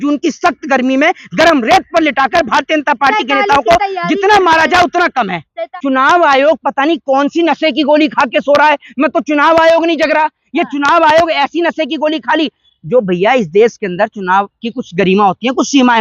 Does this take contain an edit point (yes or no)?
yes